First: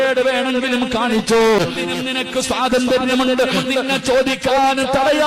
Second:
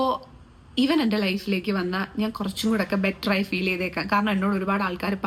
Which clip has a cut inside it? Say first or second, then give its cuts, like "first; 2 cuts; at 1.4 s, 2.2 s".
first; 1 cut; at 1.6 s